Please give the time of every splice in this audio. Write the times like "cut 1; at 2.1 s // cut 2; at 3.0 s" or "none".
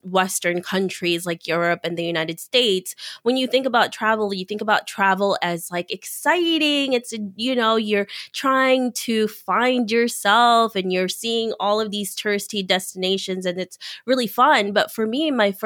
none